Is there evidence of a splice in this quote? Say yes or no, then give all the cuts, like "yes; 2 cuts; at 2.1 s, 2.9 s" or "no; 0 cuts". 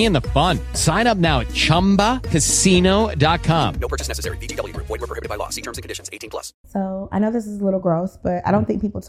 yes; 1 cut; at 6.6 s